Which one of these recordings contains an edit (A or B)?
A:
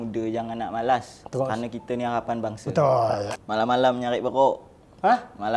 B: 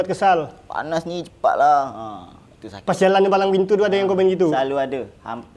A